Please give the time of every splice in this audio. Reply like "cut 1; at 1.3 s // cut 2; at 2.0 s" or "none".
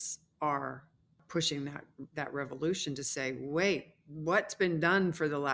none